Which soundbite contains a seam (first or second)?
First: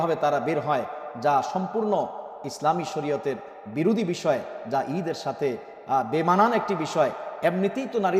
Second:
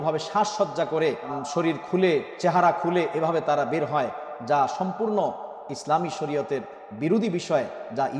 second